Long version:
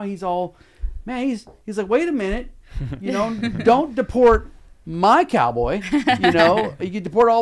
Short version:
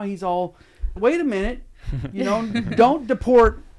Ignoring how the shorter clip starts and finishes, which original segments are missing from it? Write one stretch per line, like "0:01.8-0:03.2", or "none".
0:01.0-0:01.9